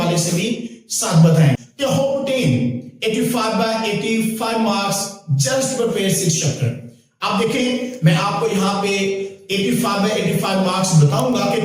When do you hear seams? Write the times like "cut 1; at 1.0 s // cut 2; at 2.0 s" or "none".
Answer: cut 1; at 1.6 s